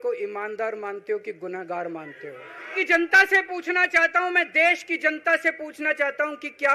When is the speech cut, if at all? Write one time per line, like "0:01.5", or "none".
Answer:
0:02.7